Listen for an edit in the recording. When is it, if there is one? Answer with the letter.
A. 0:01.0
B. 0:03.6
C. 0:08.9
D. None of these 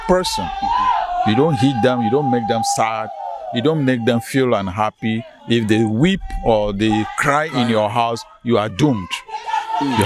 D